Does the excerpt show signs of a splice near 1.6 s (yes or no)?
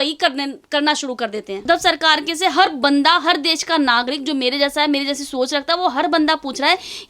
yes